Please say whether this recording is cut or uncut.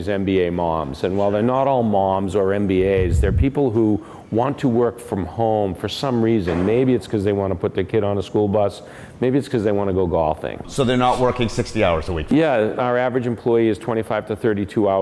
uncut